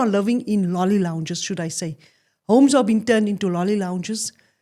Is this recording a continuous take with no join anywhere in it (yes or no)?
yes